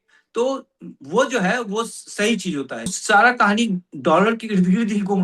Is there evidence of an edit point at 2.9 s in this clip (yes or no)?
yes